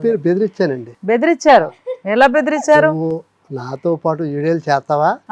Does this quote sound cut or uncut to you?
uncut